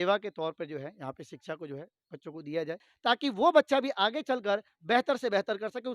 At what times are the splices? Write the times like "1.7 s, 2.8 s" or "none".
2.8 s